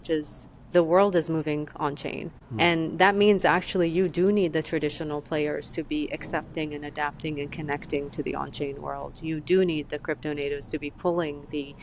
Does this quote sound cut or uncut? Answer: uncut